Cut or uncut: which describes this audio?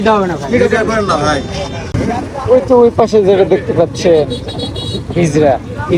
cut